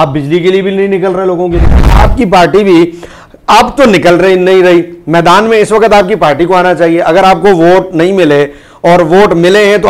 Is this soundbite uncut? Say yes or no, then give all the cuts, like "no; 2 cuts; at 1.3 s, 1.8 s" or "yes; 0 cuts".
no; 1 cut; at 2.0 s